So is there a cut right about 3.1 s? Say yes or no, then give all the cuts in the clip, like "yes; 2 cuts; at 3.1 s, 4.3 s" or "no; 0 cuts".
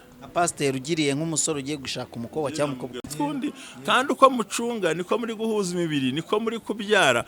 yes; 1 cut; at 3.1 s